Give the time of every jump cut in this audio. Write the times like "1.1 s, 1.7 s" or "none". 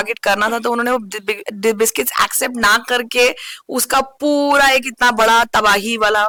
none